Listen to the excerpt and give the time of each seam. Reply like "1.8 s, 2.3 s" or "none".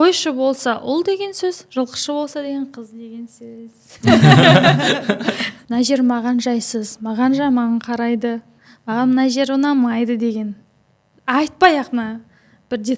5.5 s